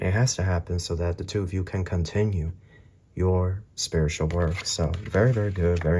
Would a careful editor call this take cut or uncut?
uncut